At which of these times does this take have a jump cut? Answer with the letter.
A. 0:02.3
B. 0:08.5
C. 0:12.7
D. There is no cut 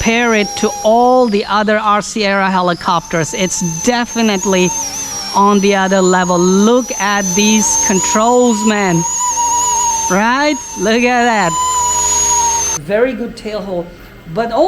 C